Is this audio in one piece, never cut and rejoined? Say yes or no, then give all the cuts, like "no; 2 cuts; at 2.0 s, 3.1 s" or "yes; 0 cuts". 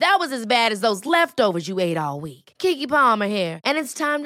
yes; 0 cuts